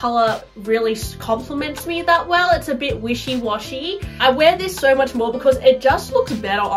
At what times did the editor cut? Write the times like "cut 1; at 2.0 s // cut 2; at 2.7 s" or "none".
none